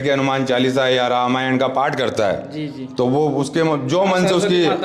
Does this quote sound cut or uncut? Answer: uncut